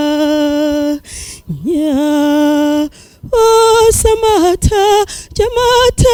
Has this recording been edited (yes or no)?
no